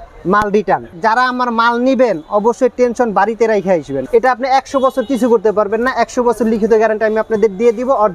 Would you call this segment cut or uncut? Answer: cut